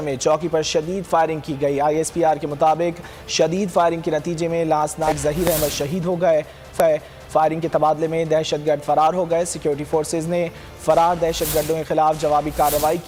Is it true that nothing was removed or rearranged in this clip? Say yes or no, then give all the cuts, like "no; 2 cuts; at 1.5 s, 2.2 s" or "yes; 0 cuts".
yes; 0 cuts